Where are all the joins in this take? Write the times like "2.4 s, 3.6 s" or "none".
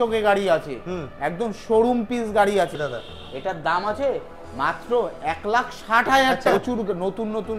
2.9 s, 6.4 s